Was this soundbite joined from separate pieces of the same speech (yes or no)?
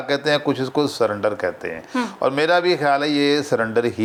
no